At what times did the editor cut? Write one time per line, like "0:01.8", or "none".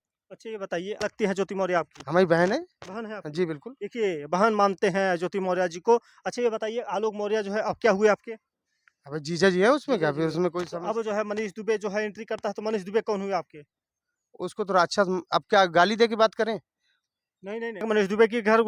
0:01.0
0:17.8